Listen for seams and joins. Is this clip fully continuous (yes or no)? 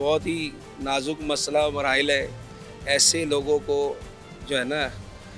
yes